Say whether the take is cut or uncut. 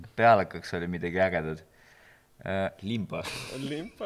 uncut